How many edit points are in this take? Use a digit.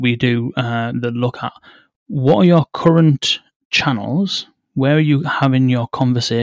1